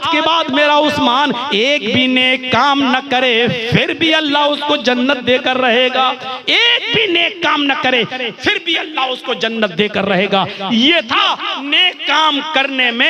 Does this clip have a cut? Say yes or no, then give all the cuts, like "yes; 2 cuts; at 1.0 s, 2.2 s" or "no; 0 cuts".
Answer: no; 0 cuts